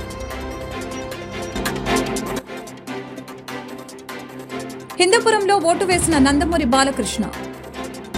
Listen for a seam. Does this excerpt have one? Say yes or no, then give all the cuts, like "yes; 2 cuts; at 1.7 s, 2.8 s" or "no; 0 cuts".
no; 0 cuts